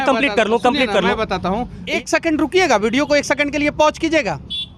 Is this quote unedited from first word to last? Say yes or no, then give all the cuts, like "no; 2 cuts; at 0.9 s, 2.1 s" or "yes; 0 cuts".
no; 1 cut; at 1.8 s